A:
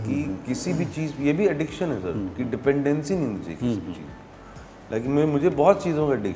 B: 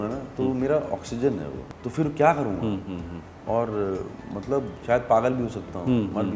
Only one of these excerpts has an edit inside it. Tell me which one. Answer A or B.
B